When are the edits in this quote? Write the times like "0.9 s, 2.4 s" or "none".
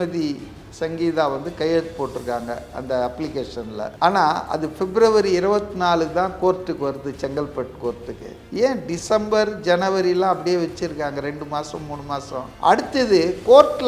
3.9 s, 12.4 s